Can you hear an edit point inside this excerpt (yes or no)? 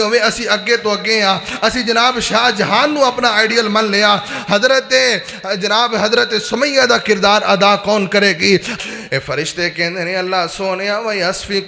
yes